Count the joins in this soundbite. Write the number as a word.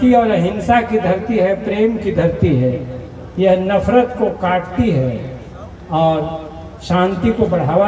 zero